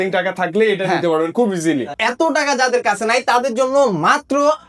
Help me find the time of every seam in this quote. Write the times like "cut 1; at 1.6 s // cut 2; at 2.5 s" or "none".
cut 1; at 2.0 s